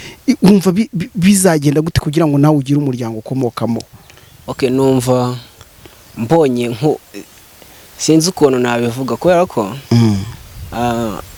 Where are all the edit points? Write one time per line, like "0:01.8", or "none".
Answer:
none